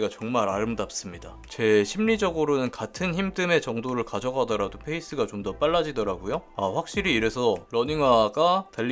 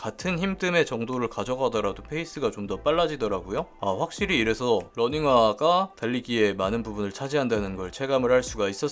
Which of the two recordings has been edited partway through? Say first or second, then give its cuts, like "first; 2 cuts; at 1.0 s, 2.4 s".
first; 1 cut; at 1.4 s